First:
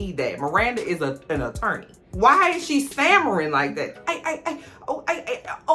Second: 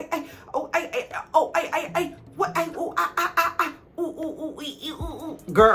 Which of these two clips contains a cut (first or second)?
first